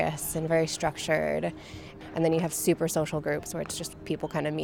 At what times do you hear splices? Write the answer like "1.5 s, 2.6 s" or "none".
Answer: 1.9 s